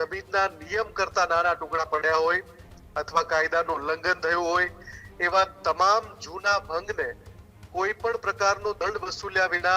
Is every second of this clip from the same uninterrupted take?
yes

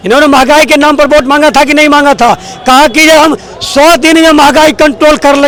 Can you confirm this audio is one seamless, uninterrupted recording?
yes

